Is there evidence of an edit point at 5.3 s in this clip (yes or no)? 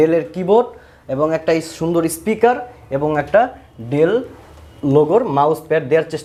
no